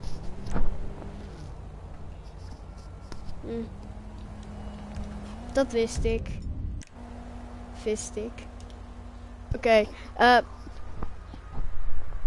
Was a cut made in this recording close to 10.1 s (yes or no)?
no